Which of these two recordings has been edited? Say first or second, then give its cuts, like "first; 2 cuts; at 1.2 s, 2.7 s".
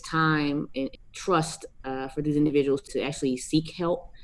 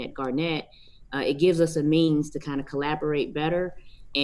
first; 2 cuts; at 0.8 s, 2.9 s